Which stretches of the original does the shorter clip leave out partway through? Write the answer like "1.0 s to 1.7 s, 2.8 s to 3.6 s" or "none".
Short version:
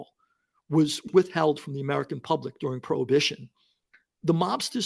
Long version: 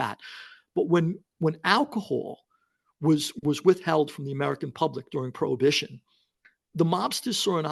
3.4 s to 3.6 s